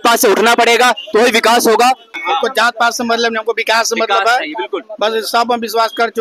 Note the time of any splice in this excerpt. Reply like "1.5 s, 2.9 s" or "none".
2.1 s